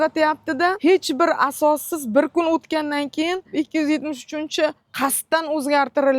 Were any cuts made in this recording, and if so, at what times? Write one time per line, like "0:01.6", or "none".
0:03.4
0:04.8